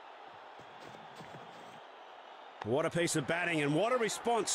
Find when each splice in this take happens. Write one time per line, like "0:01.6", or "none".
0:02.7